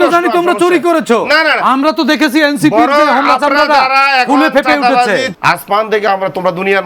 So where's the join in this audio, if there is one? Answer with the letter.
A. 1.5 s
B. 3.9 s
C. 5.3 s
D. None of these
C